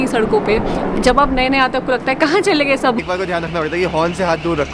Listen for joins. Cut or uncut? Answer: cut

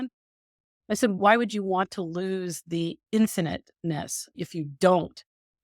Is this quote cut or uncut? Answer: cut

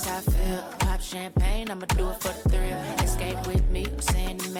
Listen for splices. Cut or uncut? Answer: uncut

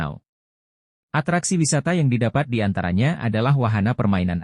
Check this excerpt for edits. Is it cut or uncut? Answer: uncut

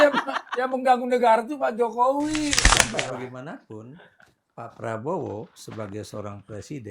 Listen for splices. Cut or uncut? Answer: cut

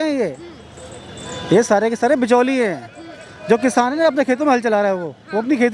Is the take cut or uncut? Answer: uncut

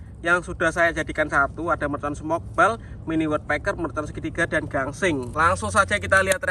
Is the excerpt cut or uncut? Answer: cut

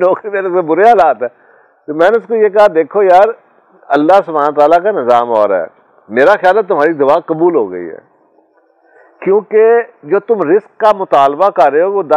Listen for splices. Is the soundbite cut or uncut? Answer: uncut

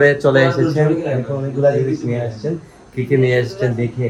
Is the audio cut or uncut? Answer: uncut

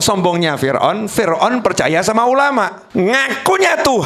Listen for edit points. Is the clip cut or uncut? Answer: cut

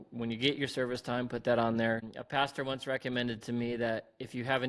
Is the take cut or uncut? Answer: cut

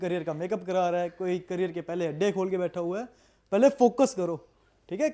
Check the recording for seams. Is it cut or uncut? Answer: uncut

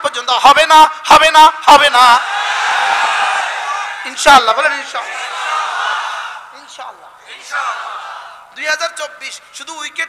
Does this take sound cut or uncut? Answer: uncut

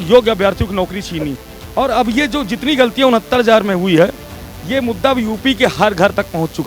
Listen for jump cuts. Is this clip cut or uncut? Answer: uncut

